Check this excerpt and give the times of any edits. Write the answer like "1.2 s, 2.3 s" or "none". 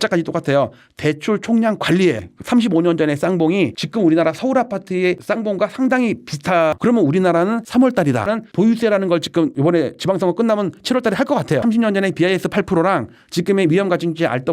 2.2 s, 6.8 s, 8.3 s, 11.6 s